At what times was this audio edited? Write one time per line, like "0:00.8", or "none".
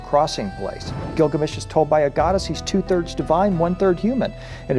0:01.0